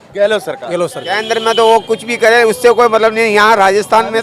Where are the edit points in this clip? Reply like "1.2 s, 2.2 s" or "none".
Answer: 1.1 s